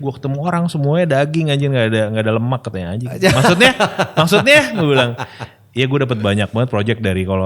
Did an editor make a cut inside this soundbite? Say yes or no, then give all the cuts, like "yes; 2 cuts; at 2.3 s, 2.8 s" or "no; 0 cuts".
no; 0 cuts